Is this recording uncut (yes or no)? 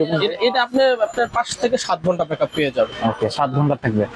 yes